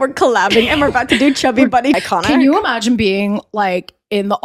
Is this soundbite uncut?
no; 1 cut; at 2.0 s

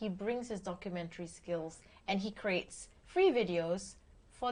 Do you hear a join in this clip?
no; 0 cuts

